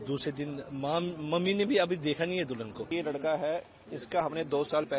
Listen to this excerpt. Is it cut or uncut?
cut